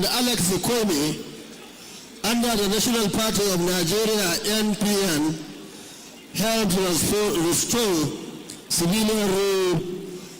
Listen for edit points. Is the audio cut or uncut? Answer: uncut